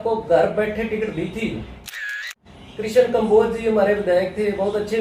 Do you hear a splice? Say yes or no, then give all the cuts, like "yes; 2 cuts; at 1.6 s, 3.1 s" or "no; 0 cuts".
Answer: yes; 1 cut; at 2.3 s